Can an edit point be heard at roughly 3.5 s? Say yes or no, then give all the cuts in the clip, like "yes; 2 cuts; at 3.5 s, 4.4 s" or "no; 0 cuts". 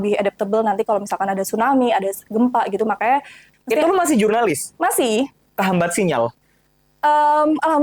yes; 1 cut; at 3.5 s